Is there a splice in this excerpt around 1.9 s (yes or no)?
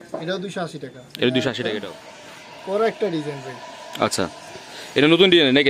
yes